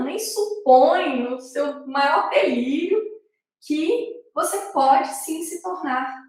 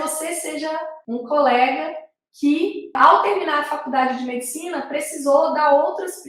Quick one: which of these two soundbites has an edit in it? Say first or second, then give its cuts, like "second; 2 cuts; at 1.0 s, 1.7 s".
second; 2 cuts; at 0.9 s, 2.9 s